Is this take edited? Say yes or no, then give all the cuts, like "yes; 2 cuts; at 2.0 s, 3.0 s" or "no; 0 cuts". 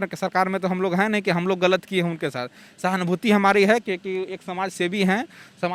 no; 0 cuts